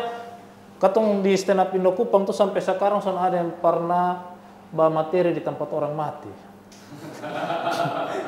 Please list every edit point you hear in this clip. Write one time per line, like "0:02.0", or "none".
none